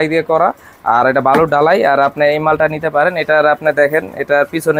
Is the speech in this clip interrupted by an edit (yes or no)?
no